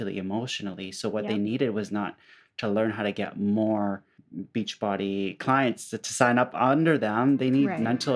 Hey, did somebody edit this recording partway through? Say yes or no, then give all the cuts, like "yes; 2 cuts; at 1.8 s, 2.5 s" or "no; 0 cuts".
no; 0 cuts